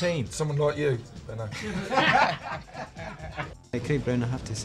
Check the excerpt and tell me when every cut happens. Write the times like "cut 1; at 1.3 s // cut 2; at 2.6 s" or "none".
cut 1; at 3.7 s